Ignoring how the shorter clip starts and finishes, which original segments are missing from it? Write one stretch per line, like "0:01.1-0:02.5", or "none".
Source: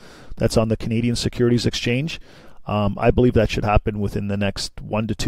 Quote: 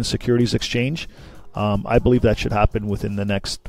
none